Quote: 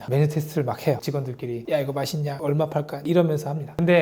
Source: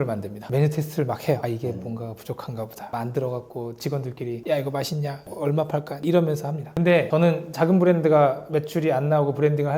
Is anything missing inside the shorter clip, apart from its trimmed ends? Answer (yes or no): yes